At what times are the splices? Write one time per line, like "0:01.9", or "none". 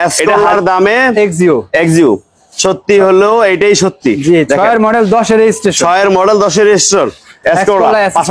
0:07.3

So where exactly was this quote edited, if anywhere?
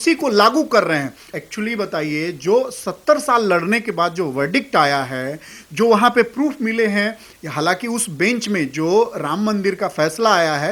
0:01.2

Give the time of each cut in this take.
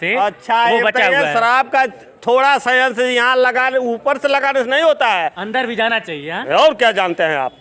none

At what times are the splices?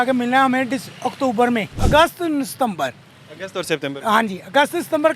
0:01.8

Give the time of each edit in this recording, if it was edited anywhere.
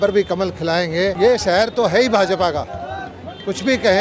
0:01.2

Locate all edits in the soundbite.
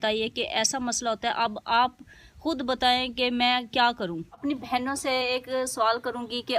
0:04.4

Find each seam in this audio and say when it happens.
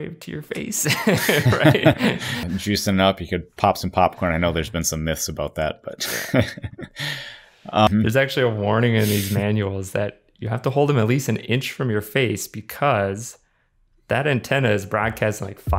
0:02.3
0:07.9

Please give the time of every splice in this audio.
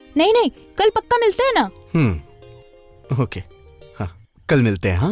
none

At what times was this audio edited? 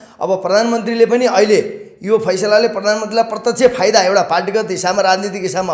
none

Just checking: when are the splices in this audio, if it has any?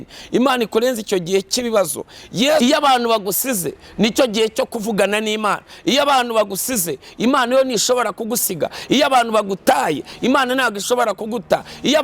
0:02.6

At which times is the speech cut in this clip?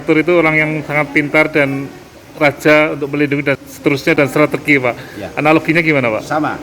0:04.1

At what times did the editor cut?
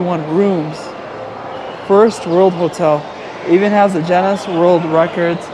none

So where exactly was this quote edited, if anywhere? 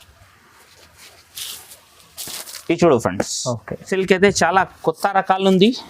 0:03.9

